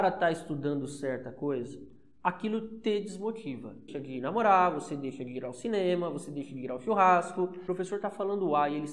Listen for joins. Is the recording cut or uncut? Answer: cut